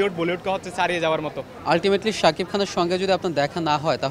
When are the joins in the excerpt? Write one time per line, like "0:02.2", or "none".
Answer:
0:01.5